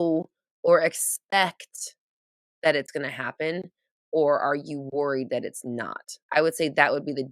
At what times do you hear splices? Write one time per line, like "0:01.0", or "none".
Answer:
0:06.2